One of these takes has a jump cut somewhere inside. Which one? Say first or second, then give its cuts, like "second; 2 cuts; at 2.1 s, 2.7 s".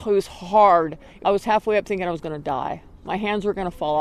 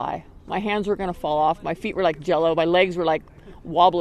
first; 1 cut; at 1.0 s